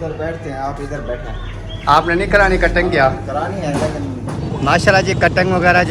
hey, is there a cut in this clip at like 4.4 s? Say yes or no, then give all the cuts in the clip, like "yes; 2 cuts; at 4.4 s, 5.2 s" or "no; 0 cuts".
yes; 1 cut; at 4.4 s